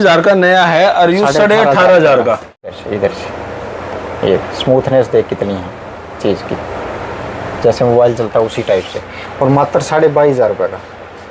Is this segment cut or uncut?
cut